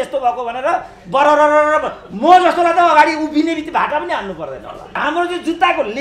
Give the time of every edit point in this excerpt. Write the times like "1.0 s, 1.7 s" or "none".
5.0 s